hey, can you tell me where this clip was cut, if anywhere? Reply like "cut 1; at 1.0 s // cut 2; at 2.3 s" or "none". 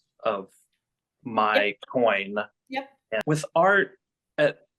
cut 1; at 3.2 s